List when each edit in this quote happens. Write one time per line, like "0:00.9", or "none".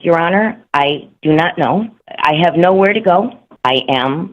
0:02.0
0:03.4